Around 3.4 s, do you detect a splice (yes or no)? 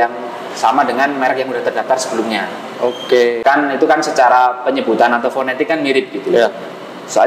yes